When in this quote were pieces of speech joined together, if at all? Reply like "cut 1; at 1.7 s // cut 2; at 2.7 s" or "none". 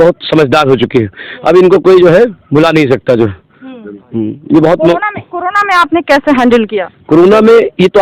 none